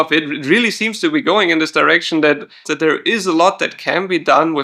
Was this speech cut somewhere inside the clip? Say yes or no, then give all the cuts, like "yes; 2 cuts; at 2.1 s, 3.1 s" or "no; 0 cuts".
yes; 1 cut; at 2.7 s